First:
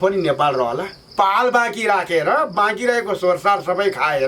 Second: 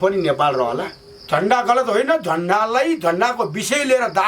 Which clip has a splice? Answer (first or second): second